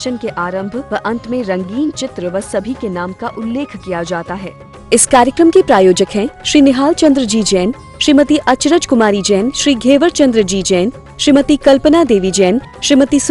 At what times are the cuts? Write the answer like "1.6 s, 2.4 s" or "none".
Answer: 4.5 s